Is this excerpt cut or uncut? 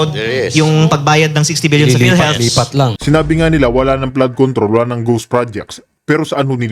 cut